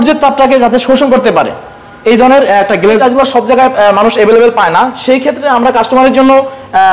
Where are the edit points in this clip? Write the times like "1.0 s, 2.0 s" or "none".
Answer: 3.0 s